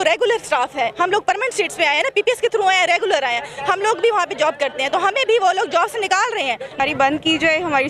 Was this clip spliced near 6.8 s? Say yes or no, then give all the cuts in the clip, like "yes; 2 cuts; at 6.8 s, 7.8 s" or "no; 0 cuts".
yes; 1 cut; at 6.8 s